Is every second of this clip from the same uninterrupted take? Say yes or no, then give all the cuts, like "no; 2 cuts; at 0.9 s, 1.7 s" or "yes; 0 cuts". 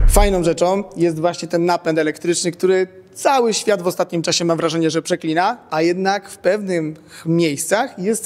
yes; 0 cuts